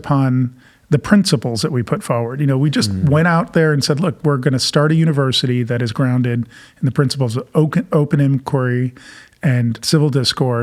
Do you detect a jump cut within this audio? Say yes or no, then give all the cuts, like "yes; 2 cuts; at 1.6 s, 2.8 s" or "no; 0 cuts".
no; 0 cuts